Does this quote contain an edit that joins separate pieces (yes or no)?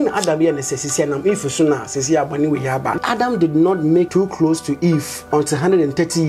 yes